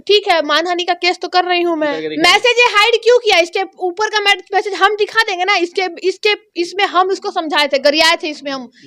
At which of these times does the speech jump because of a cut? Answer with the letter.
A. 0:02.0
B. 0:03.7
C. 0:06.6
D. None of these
A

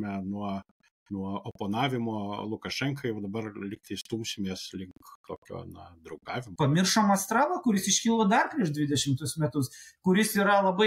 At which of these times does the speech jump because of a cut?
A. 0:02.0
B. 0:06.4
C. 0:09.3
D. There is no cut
B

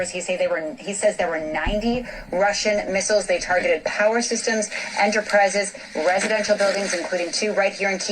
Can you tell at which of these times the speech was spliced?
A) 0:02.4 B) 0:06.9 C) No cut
B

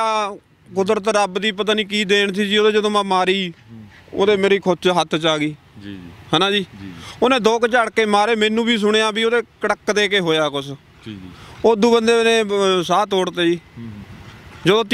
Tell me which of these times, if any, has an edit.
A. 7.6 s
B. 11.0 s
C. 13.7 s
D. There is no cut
D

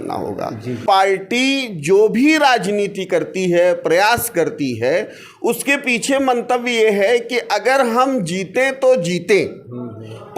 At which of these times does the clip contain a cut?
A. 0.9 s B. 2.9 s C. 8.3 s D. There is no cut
A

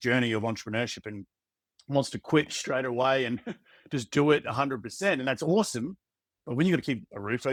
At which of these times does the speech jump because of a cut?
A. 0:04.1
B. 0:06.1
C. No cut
C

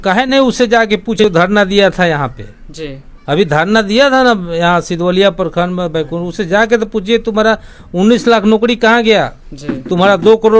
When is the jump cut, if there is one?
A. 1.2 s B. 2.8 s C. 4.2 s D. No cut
A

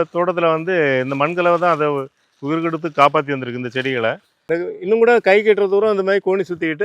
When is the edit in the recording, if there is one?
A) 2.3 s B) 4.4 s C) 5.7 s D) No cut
B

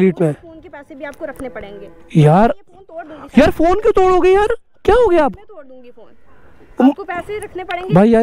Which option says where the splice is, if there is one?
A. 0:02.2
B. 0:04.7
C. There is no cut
C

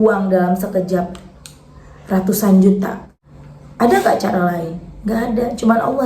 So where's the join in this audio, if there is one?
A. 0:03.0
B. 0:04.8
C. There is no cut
A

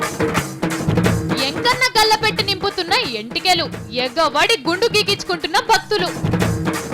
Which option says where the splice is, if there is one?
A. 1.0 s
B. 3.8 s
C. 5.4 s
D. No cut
A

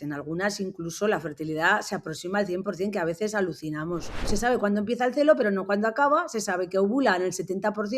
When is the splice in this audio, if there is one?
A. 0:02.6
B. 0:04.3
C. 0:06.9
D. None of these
B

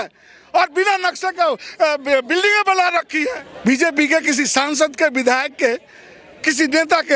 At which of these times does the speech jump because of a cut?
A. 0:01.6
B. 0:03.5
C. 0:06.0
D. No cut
B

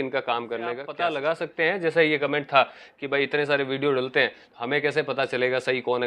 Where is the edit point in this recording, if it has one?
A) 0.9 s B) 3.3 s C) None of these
A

